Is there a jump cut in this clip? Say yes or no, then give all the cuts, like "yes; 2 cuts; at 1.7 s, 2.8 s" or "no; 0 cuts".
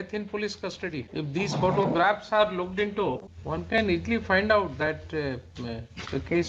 yes; 2 cuts; at 1.1 s, 3.3 s